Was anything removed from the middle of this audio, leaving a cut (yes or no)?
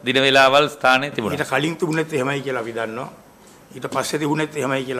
no